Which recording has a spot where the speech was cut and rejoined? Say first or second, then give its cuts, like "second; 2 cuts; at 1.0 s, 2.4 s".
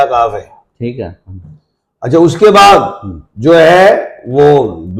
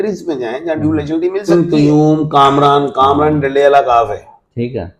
second; 1 cut; at 1.5 s